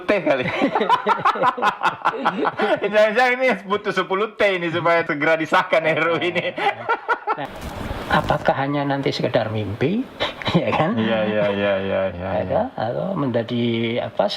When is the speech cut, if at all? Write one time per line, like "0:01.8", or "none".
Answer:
0:07.4